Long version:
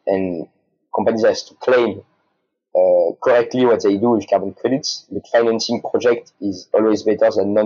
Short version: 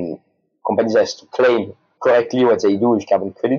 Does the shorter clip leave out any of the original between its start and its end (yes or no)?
yes